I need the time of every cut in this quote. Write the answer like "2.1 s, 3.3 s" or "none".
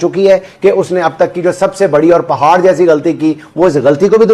none